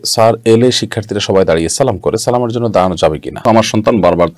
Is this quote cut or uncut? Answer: cut